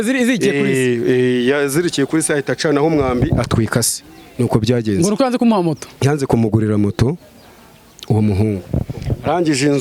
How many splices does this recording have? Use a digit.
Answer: 0